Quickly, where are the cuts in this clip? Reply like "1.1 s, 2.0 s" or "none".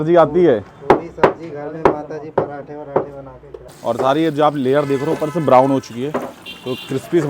3.7 s